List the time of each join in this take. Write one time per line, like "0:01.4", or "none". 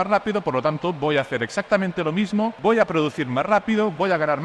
0:02.6

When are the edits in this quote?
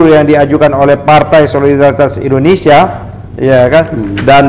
none

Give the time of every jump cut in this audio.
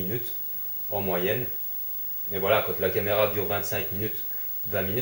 0:02.6

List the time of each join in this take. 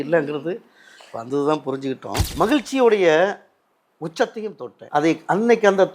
0:02.3
0:04.8

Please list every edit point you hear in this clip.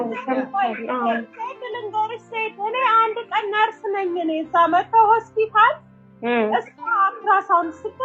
none

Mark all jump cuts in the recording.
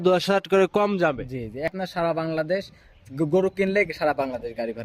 0:01.7

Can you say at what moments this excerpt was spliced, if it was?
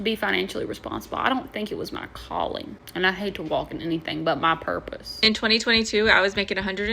0:02.8
0:05.1

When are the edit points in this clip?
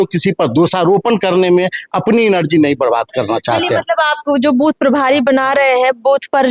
none

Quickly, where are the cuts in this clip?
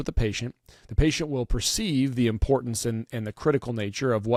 none

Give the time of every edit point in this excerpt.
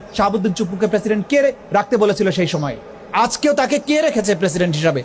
none

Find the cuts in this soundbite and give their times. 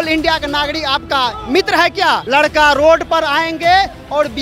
0:02.2

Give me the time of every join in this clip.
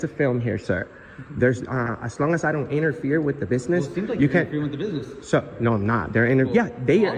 none

